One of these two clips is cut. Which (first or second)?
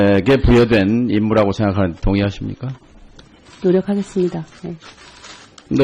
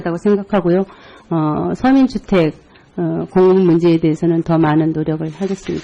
second